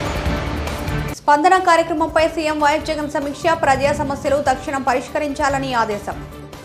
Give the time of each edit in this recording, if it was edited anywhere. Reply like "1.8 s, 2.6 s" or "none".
none